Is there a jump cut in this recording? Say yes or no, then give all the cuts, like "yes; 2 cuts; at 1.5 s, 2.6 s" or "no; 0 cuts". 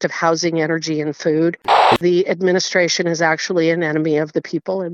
yes; 1 cut; at 2.0 s